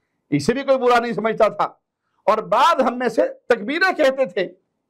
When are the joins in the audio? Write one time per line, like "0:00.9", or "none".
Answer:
none